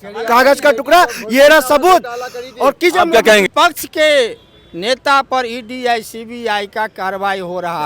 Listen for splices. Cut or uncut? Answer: cut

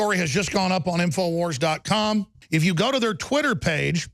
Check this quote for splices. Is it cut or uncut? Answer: cut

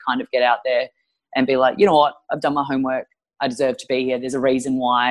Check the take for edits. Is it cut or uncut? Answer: uncut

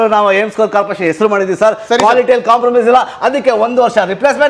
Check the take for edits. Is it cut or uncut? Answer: uncut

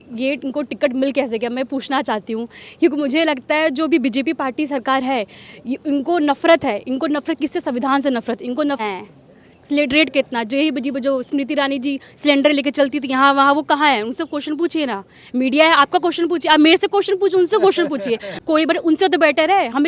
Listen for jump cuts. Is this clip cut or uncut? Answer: cut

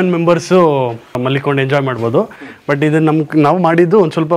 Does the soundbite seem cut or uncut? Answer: cut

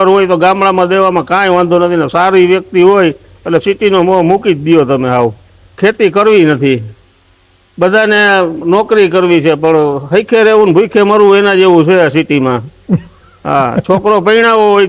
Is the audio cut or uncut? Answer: cut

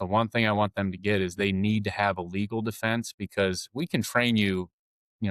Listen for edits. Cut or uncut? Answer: uncut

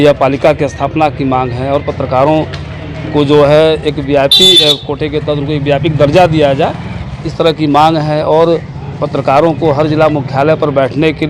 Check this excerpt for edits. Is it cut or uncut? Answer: uncut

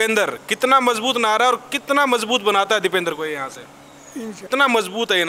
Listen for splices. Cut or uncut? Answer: uncut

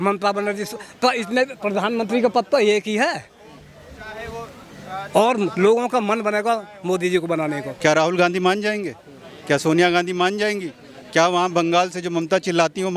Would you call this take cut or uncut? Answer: cut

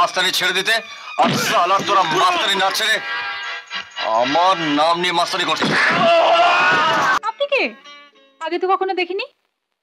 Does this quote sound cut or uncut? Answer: cut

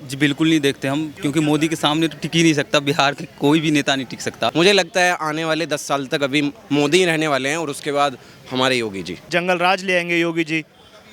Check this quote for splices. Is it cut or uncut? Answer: cut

